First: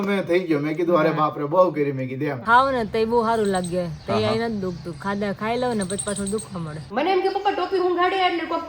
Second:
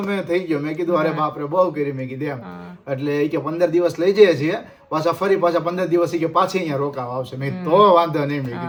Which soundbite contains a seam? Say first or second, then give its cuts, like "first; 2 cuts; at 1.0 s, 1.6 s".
first; 2 cuts; at 2.4 s, 6.8 s